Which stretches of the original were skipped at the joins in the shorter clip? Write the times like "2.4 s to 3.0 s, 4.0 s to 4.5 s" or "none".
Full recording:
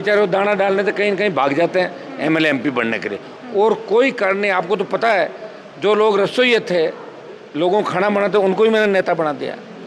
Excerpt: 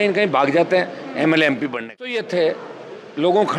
3.2 s to 6.6 s